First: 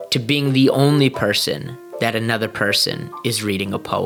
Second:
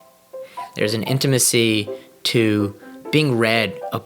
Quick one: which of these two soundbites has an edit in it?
second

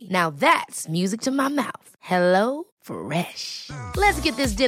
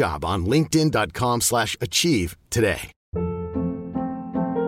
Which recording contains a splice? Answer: second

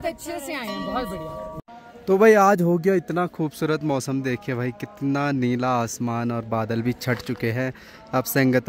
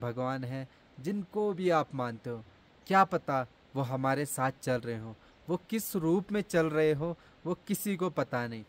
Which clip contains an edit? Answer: first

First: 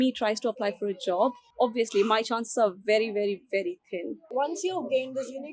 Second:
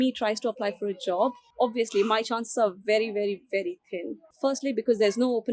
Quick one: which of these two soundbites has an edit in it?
first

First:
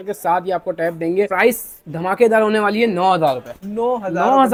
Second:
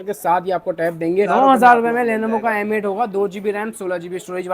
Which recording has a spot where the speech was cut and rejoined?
second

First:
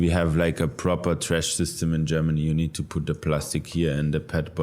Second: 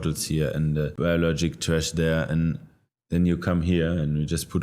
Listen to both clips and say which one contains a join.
second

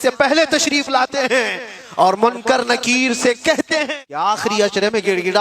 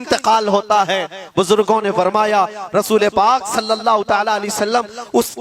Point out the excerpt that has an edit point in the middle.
first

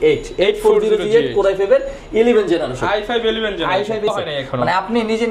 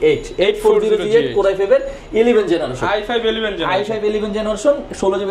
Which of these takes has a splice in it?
first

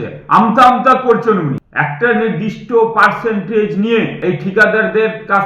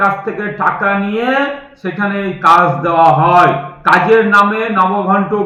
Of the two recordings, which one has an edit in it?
first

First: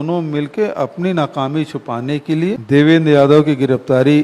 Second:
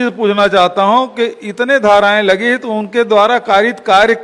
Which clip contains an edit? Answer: first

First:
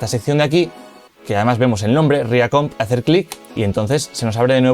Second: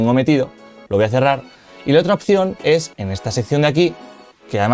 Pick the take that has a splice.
first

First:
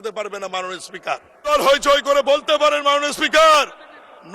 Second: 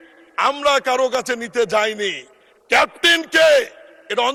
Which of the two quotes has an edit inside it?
first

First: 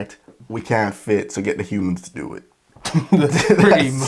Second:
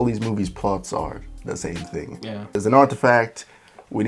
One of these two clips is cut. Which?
second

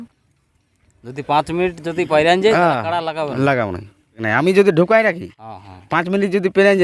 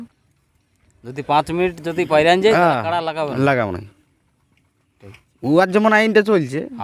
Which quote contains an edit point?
first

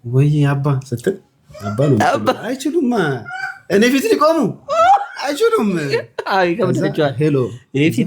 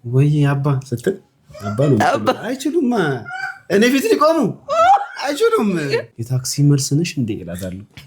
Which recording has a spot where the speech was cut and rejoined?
second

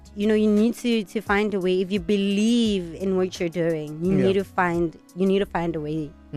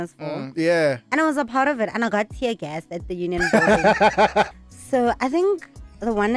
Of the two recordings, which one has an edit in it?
second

